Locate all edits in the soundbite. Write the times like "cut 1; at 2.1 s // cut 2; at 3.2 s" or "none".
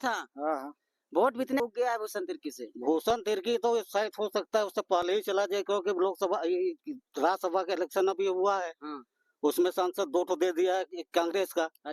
cut 1; at 1.6 s